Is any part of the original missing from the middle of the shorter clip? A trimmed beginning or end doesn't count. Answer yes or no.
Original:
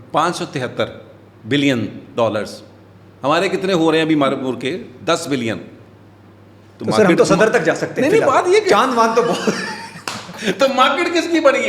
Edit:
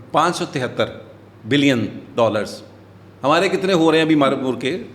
no